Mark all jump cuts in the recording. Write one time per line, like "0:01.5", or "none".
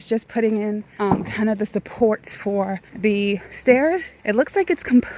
0:00.9
0:02.8
0:04.1